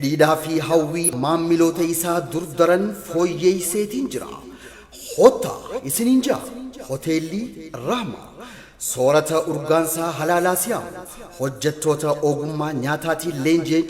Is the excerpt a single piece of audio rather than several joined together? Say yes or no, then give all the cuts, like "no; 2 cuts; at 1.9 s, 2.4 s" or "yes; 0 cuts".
no; 1 cut; at 1.1 s